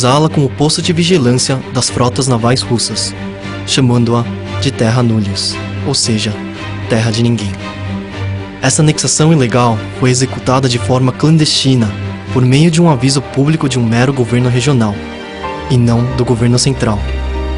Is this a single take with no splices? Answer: no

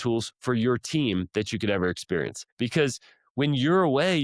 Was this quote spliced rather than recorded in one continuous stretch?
yes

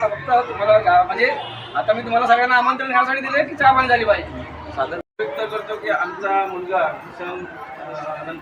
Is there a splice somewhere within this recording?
yes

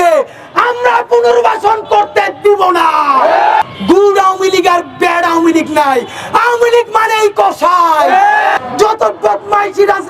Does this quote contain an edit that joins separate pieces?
yes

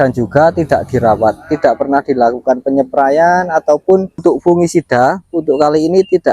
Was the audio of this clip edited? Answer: yes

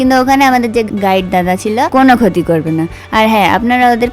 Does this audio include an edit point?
yes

